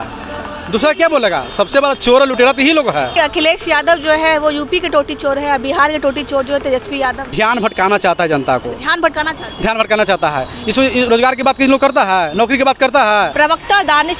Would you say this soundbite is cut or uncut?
cut